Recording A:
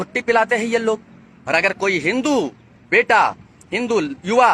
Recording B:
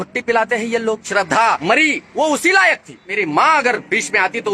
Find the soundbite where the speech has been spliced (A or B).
B